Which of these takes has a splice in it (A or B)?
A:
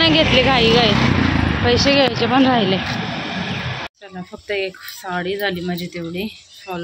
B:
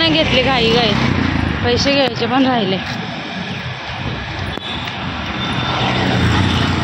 A